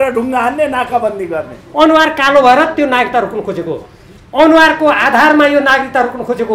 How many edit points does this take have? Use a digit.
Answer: 1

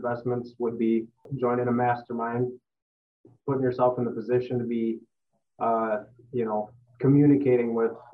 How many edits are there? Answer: 1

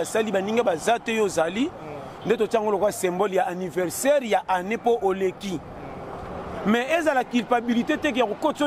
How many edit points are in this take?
0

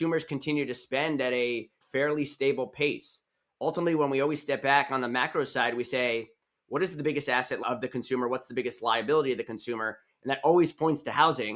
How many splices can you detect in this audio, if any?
2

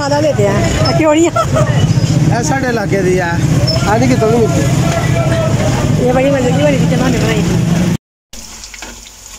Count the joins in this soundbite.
1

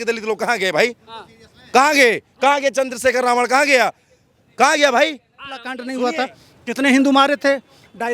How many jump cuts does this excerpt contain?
1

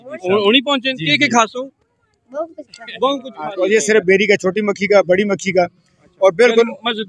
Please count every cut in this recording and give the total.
1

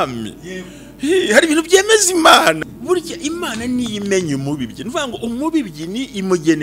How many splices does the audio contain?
1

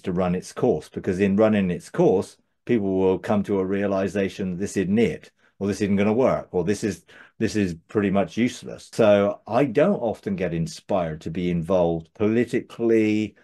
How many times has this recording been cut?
1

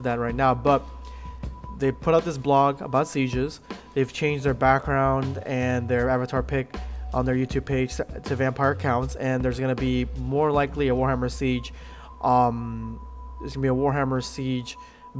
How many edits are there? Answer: 0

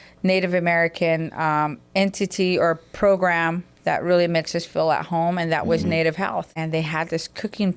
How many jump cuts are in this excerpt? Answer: 1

